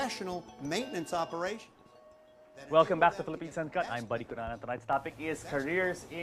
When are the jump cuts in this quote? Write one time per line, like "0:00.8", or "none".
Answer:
none